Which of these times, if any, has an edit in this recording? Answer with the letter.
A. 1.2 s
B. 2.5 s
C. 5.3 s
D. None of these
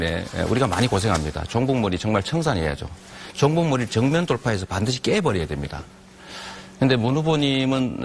B